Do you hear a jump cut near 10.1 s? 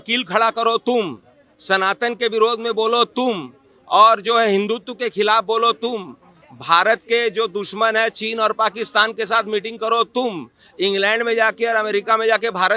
no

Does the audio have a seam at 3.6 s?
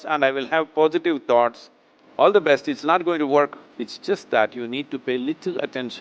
yes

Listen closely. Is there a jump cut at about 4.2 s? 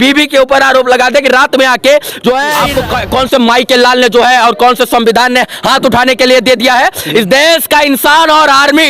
no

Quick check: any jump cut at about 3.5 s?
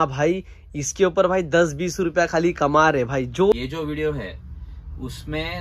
yes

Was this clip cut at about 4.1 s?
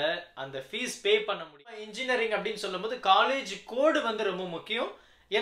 no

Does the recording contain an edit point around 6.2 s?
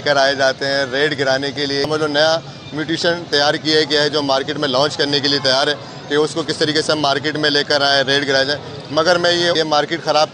no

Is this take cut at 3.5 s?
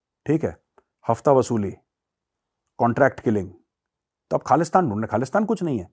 no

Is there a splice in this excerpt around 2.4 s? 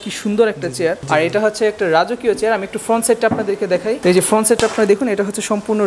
no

